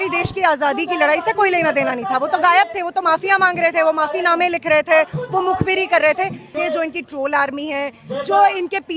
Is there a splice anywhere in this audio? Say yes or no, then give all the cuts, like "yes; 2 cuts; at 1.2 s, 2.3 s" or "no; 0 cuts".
yes; 1 cut; at 6.5 s